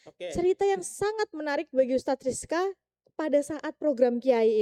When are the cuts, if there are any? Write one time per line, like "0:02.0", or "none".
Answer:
none